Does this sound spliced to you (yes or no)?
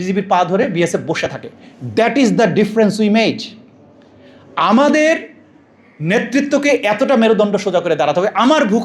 no